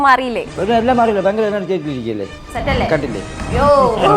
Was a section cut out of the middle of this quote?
yes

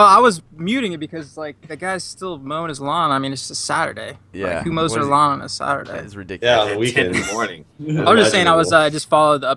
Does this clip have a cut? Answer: yes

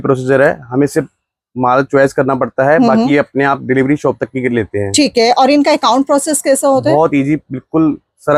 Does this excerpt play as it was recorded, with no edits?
yes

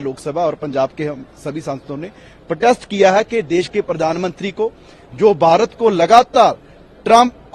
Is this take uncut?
yes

